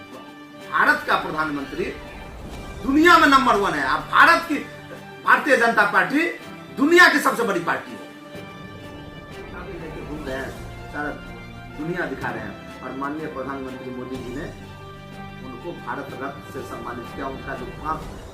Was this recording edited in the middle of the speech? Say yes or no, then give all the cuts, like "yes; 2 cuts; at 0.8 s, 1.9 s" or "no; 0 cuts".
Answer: yes; 2 cuts; at 8.0 s, 9.3 s